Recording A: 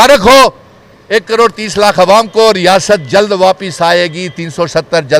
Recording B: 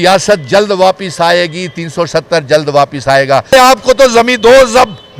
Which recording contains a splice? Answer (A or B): B